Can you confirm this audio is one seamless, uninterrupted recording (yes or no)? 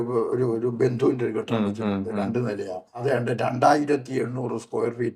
no